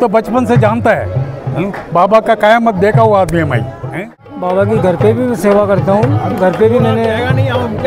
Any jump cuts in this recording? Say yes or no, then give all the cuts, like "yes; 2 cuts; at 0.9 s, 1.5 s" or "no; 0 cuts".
yes; 1 cut; at 4.3 s